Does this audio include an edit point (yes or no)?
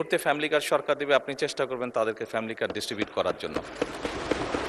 no